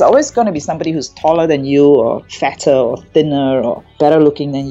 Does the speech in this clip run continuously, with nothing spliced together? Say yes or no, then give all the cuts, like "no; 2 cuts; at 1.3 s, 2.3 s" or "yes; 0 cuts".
yes; 0 cuts